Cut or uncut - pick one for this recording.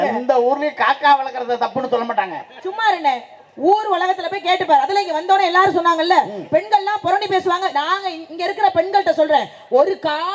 uncut